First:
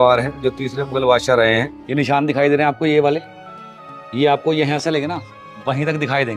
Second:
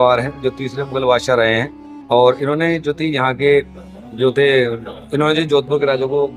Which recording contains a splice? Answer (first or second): first